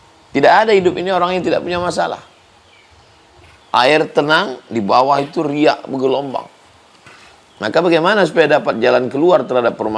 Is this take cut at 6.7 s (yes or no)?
no